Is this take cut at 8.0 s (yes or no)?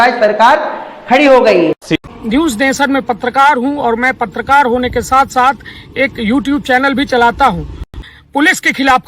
yes